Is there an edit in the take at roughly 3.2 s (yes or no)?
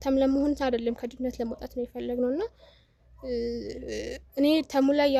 no